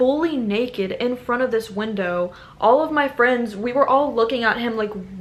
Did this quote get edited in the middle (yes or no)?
no